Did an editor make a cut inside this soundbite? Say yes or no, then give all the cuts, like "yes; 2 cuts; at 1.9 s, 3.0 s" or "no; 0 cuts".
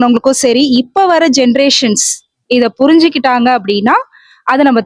no; 0 cuts